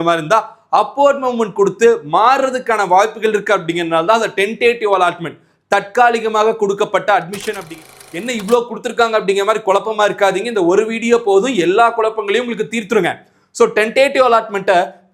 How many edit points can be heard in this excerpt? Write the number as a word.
one